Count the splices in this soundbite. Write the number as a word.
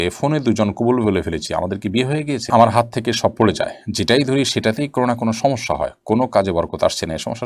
one